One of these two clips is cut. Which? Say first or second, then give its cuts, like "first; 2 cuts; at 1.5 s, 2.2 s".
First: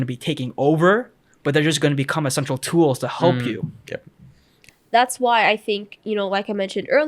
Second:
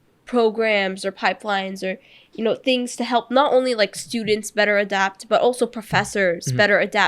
first; 1 cut; at 4.6 s